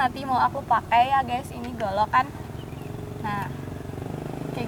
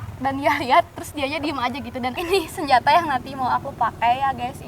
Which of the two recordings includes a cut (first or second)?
second